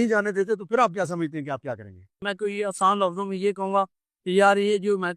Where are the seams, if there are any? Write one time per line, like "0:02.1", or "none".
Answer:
0:02.2